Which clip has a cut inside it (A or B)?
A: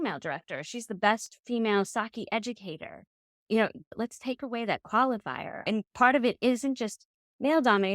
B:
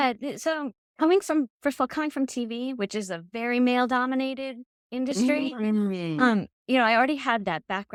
A